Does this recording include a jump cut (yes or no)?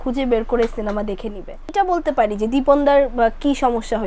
yes